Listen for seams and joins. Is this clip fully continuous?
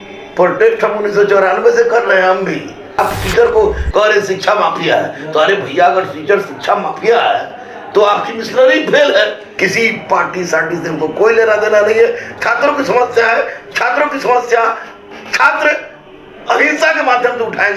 no; 2 cuts; at 3.0 s, 9.5 s

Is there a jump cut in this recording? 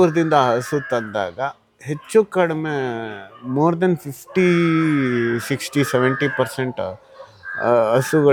no; 0 cuts

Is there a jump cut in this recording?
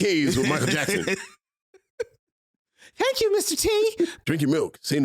yes; 1 cut; at 4.1 s

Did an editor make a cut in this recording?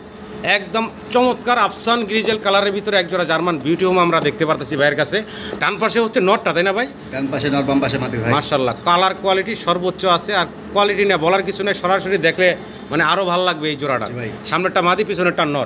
no; 0 cuts

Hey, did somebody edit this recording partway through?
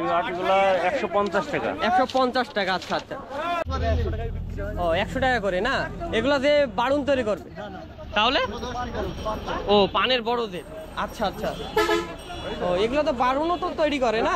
yes; 1 cut; at 3.6 s

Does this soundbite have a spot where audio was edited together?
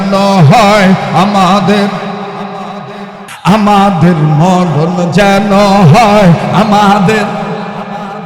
yes; 1 cut; at 3.3 s

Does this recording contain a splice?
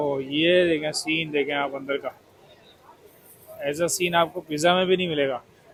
no; 0 cuts

